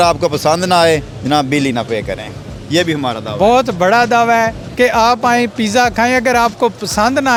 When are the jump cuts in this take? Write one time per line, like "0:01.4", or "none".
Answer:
none

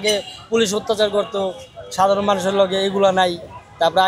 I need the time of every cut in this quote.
none

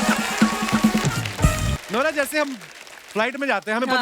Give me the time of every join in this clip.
0:01.7

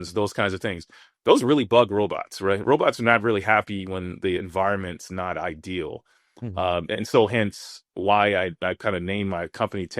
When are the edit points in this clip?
0:07.9

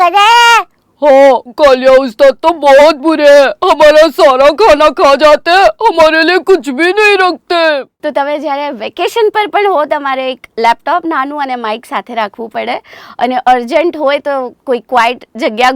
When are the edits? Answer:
0:08.0

